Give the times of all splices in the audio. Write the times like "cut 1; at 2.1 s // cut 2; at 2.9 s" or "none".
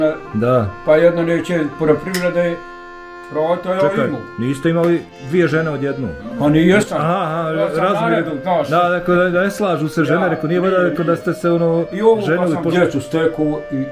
cut 1; at 12.7 s